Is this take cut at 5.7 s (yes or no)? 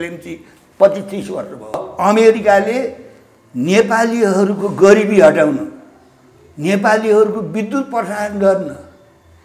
no